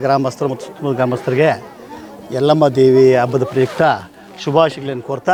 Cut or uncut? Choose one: uncut